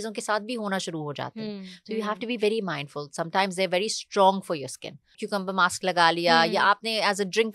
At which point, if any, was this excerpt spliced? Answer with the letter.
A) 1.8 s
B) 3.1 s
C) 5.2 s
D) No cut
C